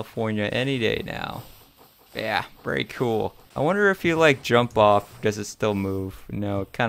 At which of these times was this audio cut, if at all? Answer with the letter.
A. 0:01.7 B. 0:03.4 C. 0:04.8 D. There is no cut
B